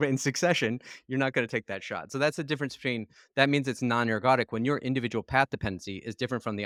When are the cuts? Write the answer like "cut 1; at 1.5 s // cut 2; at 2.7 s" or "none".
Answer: none